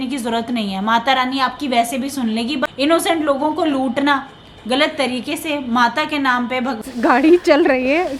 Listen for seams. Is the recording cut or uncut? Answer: cut